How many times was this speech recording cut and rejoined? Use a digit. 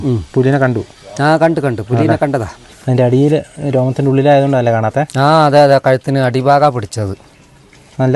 1